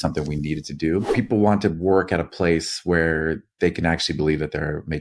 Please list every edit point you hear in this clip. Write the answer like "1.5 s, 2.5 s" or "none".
1.1 s